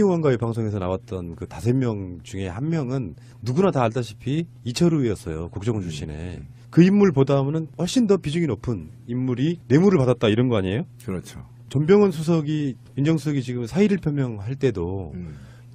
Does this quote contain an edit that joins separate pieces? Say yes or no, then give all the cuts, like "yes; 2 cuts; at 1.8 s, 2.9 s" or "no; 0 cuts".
no; 0 cuts